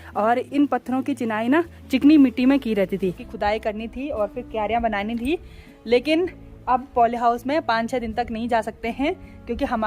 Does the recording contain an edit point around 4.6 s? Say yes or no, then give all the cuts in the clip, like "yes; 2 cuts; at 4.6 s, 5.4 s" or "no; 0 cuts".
no; 1 cut; at 3.3 s